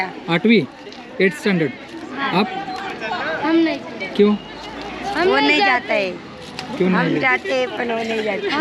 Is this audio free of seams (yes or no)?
yes